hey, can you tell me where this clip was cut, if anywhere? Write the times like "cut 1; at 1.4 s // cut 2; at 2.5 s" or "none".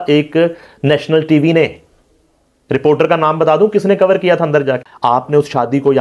cut 1; at 4.9 s